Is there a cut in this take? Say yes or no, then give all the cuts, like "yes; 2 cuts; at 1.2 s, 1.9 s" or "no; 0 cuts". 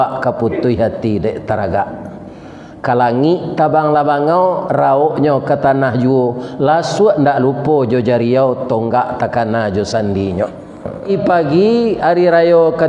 yes; 1 cut; at 11.1 s